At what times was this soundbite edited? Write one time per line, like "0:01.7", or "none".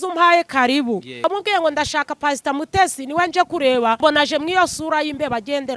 0:01.2
0:04.0